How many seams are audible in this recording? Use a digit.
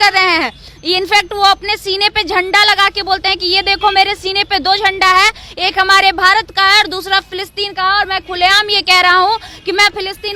0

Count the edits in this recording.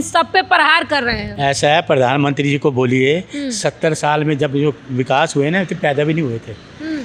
0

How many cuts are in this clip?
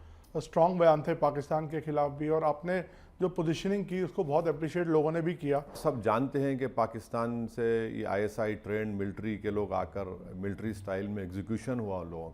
1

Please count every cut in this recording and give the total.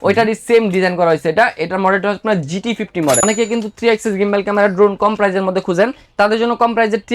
1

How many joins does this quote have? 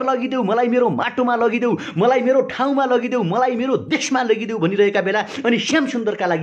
0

